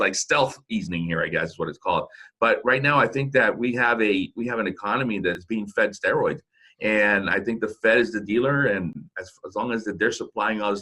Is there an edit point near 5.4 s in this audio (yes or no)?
yes